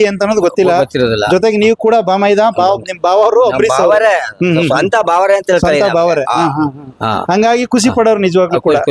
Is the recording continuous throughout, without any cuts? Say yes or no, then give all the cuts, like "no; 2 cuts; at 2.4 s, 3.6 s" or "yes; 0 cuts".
yes; 0 cuts